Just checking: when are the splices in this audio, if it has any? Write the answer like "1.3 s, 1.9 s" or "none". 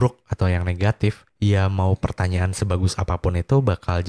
1.3 s